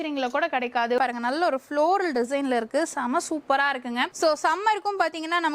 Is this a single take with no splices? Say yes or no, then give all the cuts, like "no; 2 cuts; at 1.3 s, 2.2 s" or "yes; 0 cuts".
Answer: no; 2 cuts; at 1.0 s, 4.1 s